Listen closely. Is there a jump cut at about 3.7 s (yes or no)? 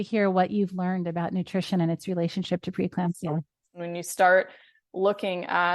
yes